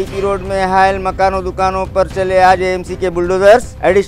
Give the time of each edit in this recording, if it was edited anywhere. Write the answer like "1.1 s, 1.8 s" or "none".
none